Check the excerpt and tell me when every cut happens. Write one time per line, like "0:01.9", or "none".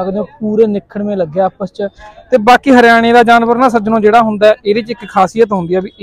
none